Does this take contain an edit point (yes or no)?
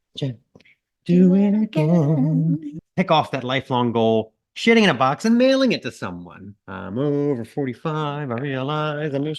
yes